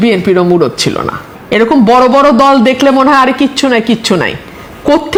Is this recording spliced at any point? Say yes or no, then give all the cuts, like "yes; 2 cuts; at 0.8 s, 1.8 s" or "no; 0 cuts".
no; 0 cuts